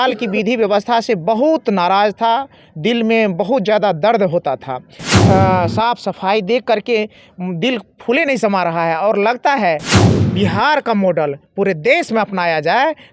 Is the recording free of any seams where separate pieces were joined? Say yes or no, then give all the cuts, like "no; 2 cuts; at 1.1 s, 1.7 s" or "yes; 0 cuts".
no; 2 cuts; at 5.1 s, 9.9 s